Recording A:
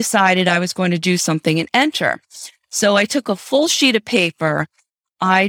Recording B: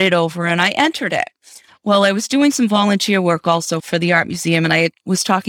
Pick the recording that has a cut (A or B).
B